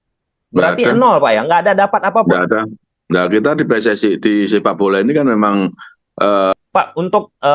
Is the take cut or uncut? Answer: cut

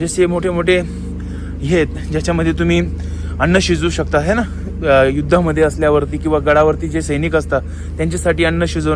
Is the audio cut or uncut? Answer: uncut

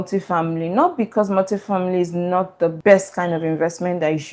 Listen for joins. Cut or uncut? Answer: uncut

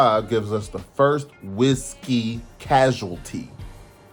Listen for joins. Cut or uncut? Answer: uncut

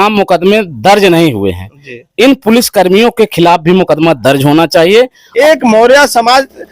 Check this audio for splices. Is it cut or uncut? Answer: cut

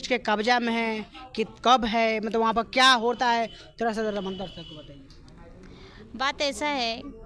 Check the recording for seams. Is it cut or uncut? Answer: uncut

